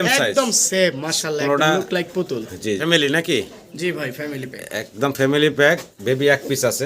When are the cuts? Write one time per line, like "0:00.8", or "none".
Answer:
0:02.8